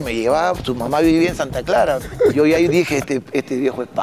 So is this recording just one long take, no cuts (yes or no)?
no